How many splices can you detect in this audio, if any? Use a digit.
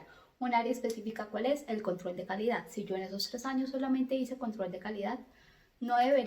0